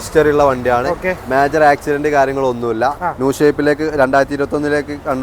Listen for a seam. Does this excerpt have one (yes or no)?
no